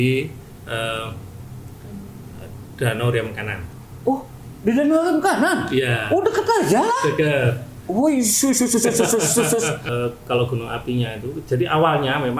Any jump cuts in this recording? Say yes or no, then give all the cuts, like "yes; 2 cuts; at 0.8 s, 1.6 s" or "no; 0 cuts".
yes; 1 cut; at 9.8 s